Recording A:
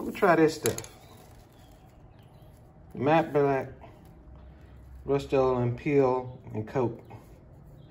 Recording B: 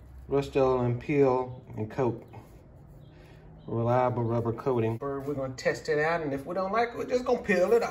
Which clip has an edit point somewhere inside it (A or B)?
B